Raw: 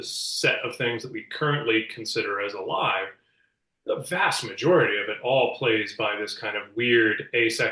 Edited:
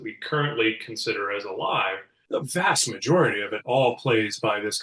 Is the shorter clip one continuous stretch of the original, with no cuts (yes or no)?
no